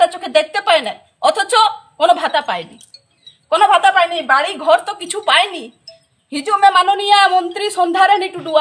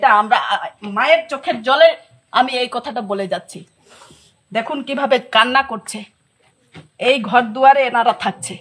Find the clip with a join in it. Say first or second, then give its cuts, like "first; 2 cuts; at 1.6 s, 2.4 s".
first; 1 cut; at 3.8 s